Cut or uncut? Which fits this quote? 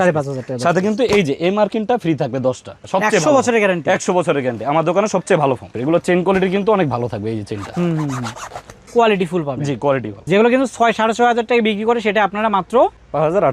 cut